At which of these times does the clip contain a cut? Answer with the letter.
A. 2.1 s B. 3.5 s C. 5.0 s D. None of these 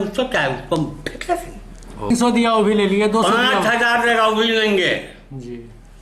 A